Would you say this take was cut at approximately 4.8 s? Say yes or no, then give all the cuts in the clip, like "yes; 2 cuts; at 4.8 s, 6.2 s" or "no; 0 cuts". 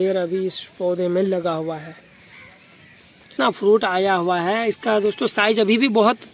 no; 1 cut; at 3.2 s